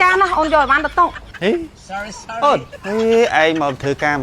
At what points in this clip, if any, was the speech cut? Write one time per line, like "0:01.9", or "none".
0:02.7